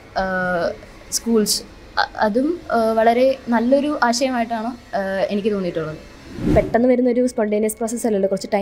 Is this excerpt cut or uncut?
cut